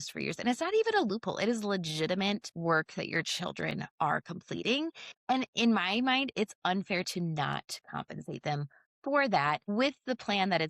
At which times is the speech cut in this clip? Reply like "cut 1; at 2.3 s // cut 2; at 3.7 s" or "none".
cut 1; at 2.5 s // cut 2; at 9.6 s